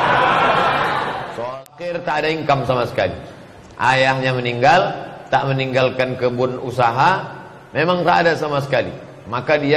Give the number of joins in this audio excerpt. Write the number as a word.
one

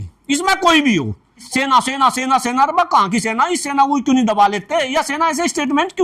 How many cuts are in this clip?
one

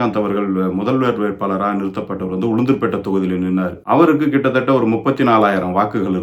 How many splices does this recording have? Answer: one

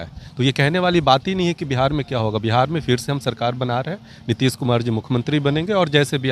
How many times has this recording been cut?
zero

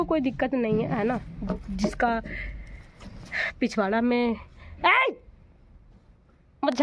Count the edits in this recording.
zero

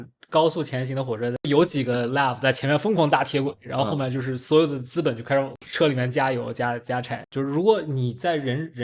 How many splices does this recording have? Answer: three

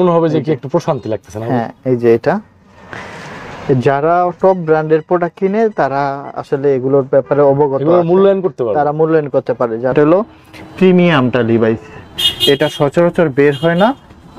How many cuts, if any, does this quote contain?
one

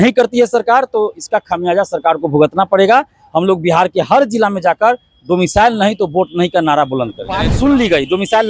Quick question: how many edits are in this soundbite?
one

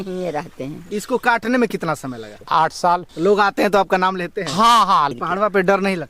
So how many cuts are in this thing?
four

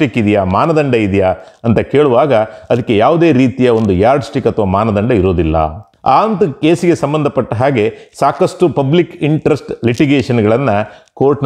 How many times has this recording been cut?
one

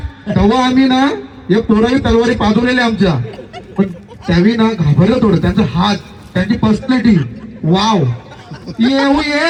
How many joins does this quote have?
zero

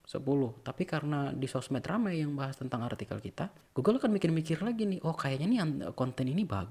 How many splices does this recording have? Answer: one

